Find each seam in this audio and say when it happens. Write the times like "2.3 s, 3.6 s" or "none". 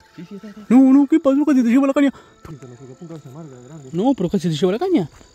2.3 s